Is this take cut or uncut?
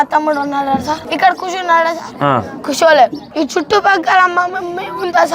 cut